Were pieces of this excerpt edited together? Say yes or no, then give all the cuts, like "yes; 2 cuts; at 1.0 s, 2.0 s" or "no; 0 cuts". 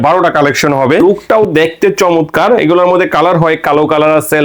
yes; 1 cut; at 1.0 s